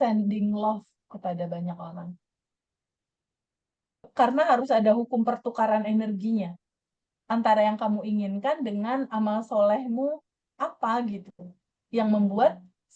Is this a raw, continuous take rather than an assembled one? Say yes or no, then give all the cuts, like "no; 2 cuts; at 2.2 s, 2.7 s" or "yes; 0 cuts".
no; 1 cut; at 4.1 s